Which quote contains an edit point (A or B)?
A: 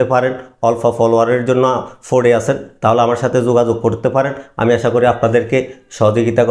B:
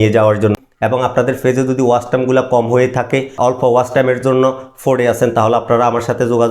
B